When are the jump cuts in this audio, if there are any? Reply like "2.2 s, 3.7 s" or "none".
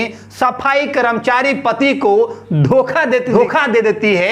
3.3 s